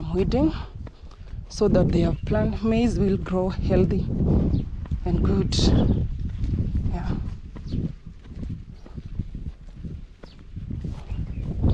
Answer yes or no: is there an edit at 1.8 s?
no